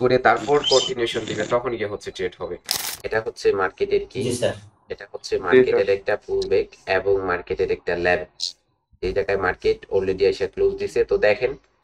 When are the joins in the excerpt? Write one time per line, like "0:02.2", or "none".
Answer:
0:02.9